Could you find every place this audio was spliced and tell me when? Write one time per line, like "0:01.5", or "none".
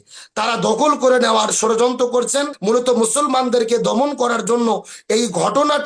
0:02.5